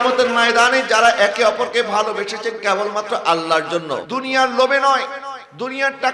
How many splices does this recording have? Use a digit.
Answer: 1